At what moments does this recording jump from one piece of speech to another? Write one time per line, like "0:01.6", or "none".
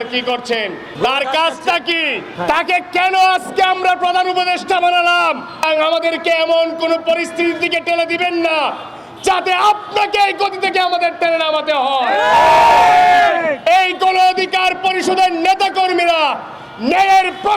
0:00.8
0:02.3
0:05.6